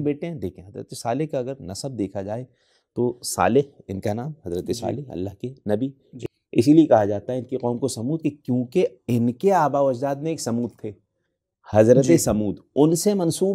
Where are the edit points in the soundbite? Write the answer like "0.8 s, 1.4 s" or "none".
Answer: 6.1 s